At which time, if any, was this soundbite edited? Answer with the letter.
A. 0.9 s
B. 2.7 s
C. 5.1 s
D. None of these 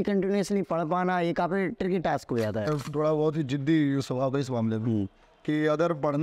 B